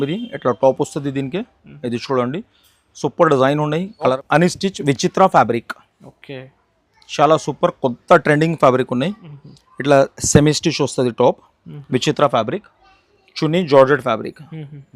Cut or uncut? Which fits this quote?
cut